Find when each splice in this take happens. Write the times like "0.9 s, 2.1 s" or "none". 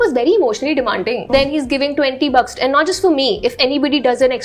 1.3 s